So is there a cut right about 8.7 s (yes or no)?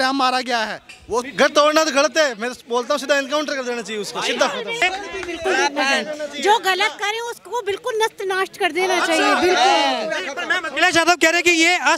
no